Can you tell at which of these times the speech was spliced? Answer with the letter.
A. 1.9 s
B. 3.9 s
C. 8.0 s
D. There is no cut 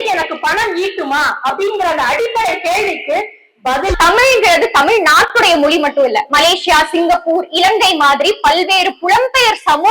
B